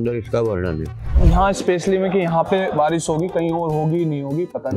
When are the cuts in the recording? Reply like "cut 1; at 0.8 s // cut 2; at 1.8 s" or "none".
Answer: cut 1; at 1.1 s